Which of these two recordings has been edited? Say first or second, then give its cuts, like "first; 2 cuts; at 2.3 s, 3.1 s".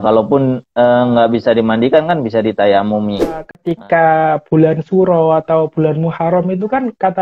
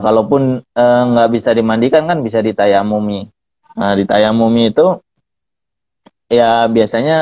first; 1 cut; at 3.6 s